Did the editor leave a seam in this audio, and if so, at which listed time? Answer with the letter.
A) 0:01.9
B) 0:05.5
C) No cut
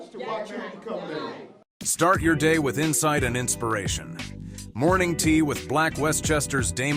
A